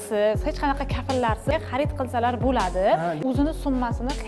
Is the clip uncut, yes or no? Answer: no